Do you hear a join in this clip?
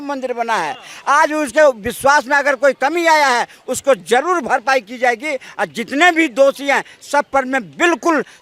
no; 0 cuts

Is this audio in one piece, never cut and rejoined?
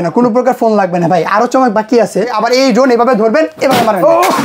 no; 1 cut; at 2.3 s

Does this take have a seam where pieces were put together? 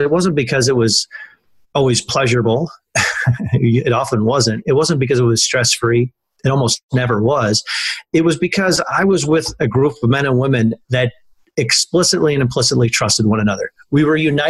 no; 0 cuts

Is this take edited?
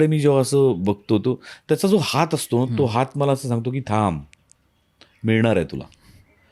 no; 0 cuts

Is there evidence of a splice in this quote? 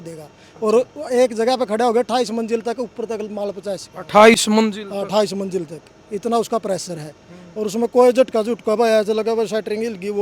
no; 0 cuts

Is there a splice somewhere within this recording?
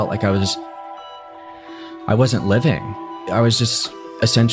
no; 0 cuts

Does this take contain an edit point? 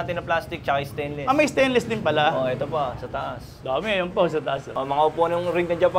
yes; 1 cut; at 4.7 s

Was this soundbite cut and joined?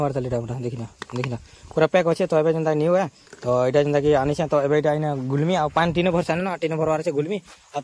no; 0 cuts

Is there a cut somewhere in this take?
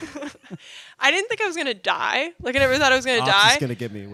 no; 0 cuts

